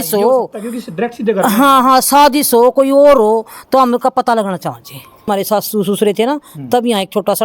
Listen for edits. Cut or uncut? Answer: cut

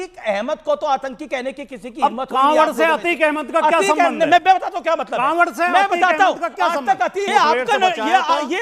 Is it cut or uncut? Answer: cut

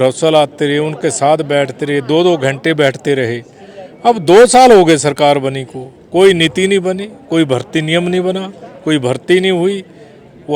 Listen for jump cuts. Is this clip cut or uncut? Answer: uncut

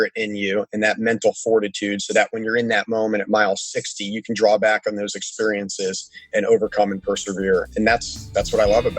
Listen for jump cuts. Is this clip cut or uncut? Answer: cut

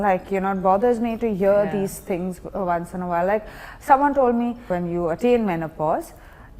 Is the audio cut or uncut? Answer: cut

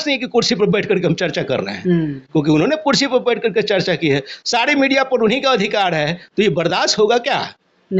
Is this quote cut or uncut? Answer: uncut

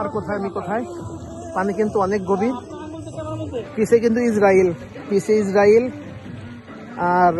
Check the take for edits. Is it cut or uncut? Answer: cut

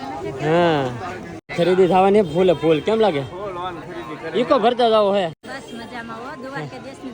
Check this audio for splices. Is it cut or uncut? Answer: cut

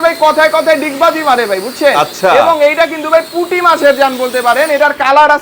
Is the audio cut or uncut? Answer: uncut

